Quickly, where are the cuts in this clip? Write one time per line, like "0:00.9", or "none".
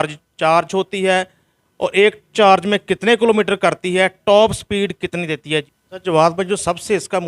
0:05.7